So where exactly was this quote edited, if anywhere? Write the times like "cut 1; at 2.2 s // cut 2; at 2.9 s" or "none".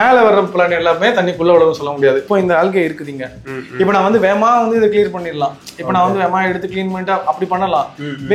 cut 1; at 2.3 s